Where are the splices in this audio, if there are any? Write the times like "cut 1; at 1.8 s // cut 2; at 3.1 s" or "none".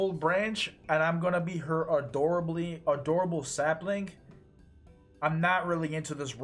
none